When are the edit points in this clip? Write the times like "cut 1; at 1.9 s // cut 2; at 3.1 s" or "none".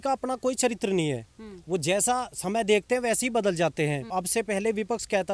cut 1; at 4.0 s